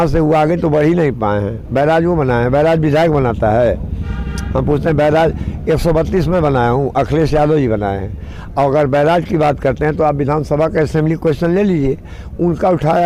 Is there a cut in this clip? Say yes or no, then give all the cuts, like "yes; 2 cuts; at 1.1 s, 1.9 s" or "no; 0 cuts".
no; 0 cuts